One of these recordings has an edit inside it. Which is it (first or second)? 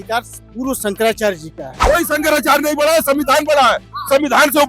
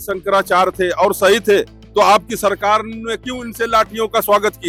first